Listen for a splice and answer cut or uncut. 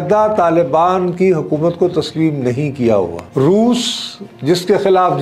cut